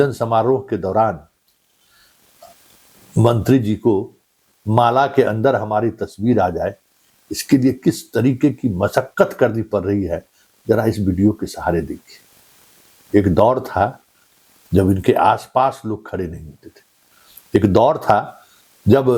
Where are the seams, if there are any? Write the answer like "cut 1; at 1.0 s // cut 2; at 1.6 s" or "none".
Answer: none